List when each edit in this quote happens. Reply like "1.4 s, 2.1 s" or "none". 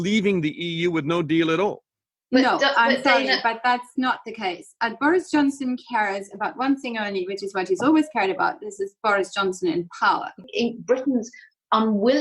10.5 s